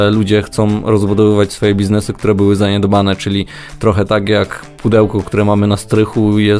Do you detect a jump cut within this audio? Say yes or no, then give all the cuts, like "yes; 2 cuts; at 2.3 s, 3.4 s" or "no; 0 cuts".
no; 0 cuts